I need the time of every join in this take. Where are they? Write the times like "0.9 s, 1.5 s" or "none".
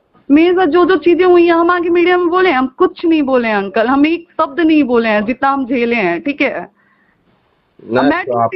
none